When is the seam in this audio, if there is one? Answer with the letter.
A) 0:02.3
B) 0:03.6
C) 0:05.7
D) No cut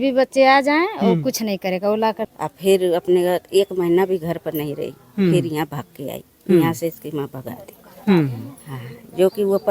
A